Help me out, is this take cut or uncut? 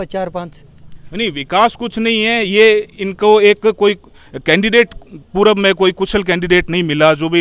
uncut